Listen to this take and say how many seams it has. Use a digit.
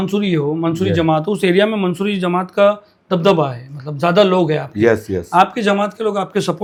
0